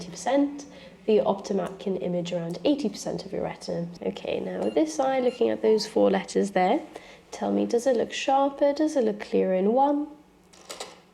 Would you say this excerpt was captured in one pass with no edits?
no; 1 cut; at 3.9 s

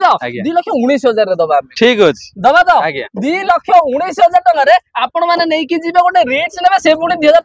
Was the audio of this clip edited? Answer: no; 0 cuts

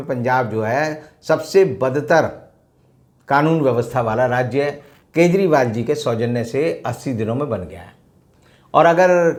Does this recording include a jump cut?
no; 0 cuts

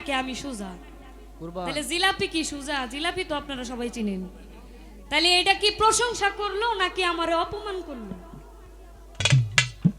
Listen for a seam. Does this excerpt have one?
no; 0 cuts

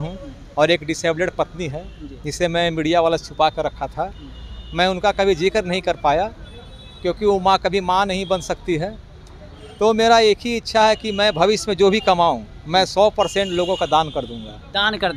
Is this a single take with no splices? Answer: yes; 0 cuts

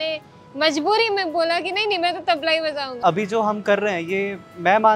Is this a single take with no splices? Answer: no; 1 cut; at 3.0 s

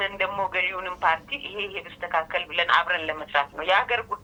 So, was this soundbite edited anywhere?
no; 0 cuts

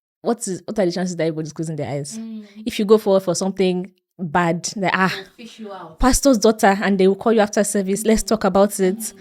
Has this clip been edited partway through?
no; 0 cuts

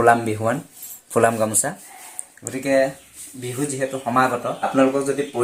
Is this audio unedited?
yes; 0 cuts

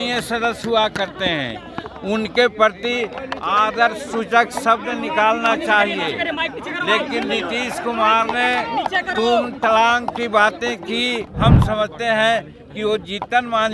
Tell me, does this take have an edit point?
yes; 1 cut; at 11.3 s

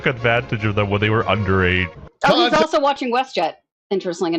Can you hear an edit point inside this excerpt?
no; 0 cuts

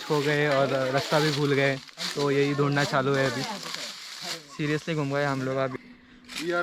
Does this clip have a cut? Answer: yes; 1 cut; at 5.7 s

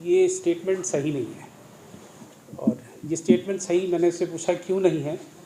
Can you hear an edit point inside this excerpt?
no; 0 cuts

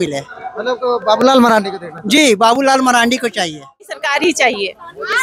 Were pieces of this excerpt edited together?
yes; 1 cut; at 4.0 s

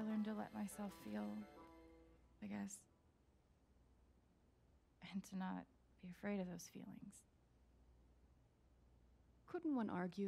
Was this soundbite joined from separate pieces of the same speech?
yes; 4 cuts; at 2.9 s, 5.0 s, 7.7 s, 9.4 s

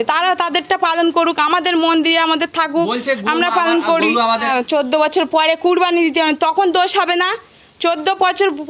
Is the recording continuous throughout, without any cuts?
no; 1 cut; at 4.4 s

